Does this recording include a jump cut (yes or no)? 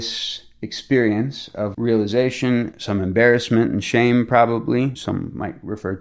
yes